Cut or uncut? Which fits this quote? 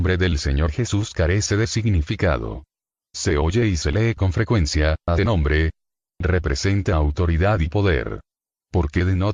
uncut